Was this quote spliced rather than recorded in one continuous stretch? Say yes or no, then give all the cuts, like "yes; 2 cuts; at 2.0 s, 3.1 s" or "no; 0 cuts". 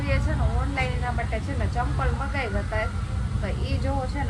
no; 0 cuts